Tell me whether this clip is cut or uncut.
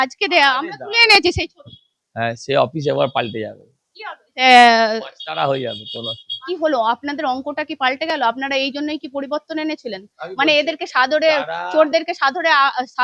cut